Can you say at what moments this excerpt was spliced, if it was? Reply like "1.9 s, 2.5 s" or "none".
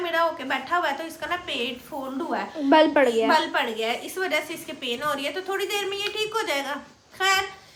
none